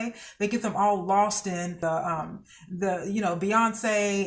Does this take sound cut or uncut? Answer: cut